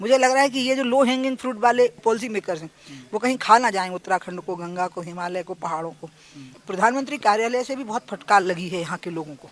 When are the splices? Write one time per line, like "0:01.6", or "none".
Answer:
0:02.0
0:06.6